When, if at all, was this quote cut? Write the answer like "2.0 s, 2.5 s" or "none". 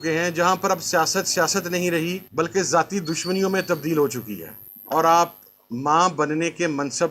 4.7 s